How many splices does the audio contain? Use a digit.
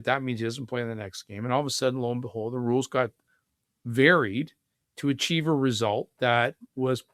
0